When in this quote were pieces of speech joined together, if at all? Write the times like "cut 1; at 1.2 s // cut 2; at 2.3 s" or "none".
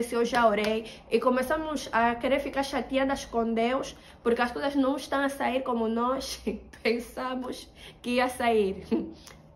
none